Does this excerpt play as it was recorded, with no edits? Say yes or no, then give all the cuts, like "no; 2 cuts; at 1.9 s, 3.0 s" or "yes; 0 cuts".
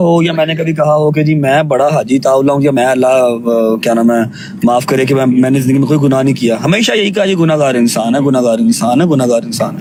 yes; 0 cuts